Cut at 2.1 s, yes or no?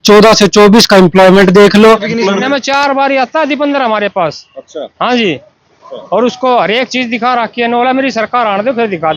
yes